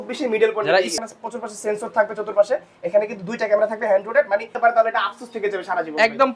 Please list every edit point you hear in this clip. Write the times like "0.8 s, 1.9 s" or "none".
0.9 s, 4.5 s